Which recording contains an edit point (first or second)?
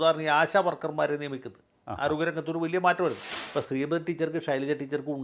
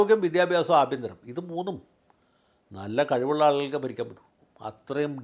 first